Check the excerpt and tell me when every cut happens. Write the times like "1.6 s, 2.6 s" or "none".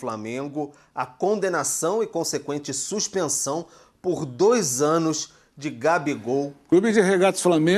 6.6 s